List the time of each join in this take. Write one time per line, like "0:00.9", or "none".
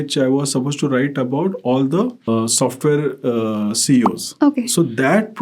0:02.3
0:04.2